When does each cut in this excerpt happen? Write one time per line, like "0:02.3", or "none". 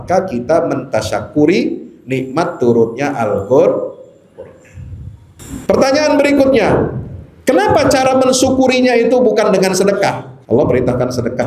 0:05.4
0:10.3